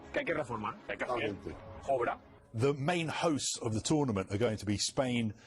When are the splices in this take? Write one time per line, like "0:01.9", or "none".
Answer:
0:02.3